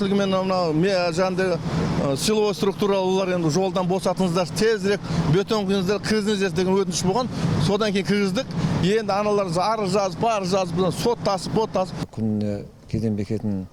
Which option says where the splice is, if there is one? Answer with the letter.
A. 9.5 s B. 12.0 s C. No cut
B